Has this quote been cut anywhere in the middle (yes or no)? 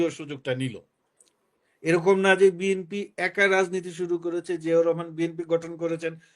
no